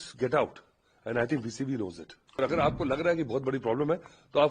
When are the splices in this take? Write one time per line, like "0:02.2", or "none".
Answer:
0:02.3